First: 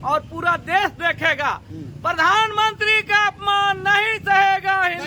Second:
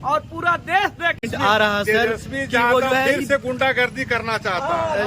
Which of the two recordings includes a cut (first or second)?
second